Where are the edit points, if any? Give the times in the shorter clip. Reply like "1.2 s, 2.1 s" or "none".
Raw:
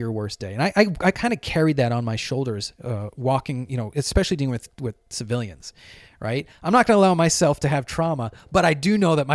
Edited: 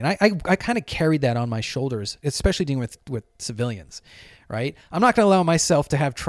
2.2 s